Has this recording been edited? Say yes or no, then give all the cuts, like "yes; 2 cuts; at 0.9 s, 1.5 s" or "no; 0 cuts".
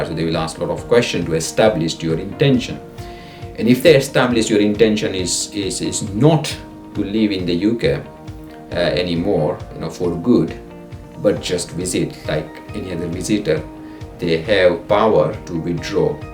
yes; 2 cuts; at 9.7 s, 15.4 s